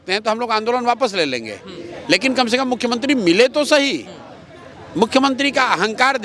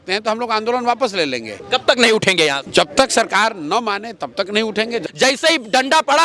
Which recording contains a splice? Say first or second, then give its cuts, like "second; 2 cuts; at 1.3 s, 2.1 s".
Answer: second; 3 cuts; at 1.5 s, 2.6 s, 5.0 s